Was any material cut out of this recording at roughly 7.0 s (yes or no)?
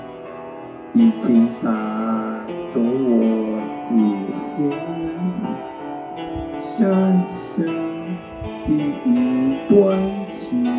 no